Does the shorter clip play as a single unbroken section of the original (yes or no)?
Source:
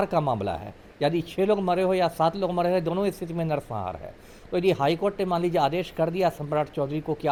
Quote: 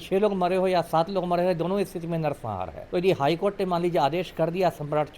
no